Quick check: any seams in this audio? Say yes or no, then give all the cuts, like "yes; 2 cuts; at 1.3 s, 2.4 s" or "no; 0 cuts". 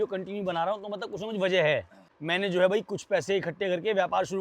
yes; 1 cut; at 2.1 s